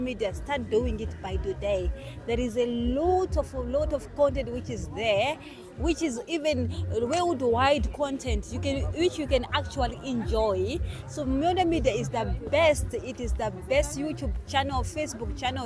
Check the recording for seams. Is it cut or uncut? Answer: uncut